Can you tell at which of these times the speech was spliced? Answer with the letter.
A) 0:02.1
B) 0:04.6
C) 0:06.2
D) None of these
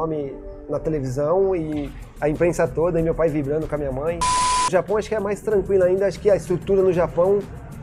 B